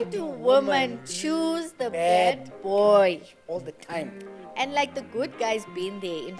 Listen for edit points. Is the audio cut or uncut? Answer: uncut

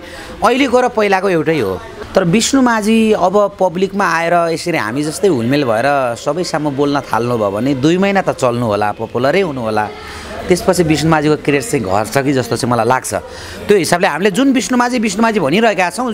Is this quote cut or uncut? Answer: cut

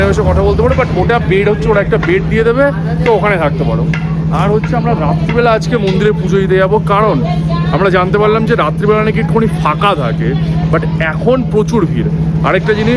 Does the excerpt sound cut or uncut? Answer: uncut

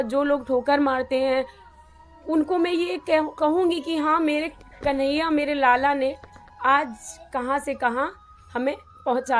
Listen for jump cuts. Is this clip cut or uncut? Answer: uncut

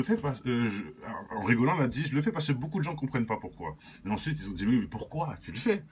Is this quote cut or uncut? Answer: uncut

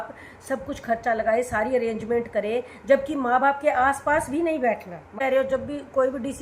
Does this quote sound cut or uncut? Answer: cut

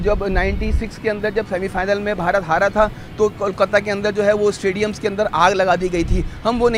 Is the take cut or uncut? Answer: uncut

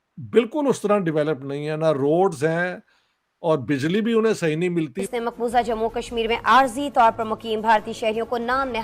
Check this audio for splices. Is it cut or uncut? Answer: cut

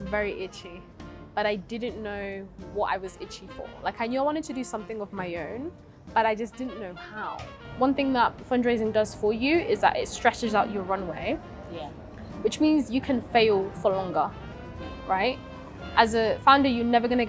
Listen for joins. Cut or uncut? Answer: cut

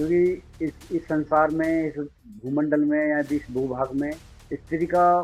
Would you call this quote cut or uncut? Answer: uncut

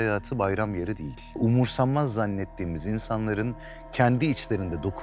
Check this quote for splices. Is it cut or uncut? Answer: cut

